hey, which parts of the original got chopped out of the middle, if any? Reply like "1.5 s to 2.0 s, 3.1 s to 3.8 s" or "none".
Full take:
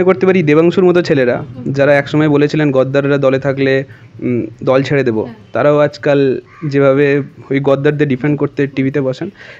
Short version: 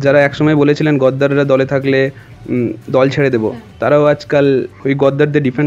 6.5 s to 7.4 s